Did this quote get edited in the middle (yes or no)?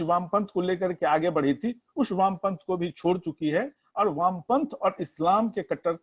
no